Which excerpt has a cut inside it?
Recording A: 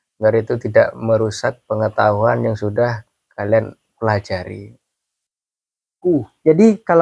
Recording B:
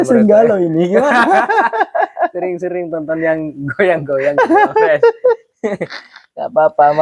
A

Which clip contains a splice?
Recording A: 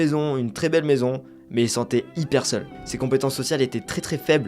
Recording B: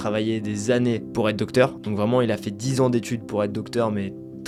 A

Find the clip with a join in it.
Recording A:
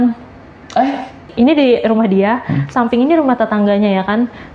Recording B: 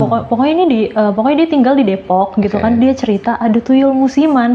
A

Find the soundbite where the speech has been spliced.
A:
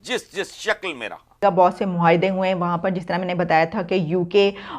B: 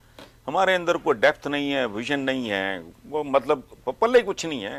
A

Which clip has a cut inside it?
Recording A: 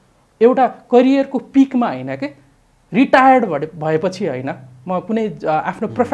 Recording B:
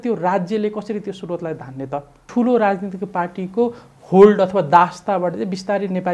B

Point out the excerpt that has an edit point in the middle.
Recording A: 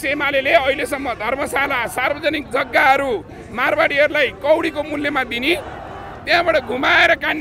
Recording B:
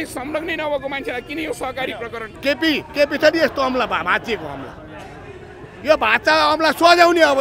B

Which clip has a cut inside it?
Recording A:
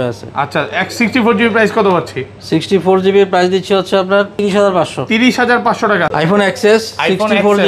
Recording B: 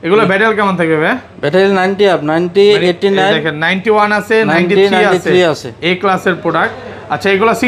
A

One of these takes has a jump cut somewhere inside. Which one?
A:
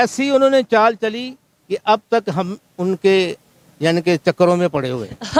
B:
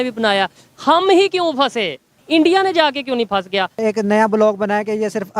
B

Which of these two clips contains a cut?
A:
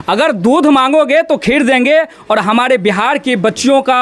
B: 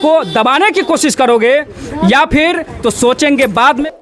B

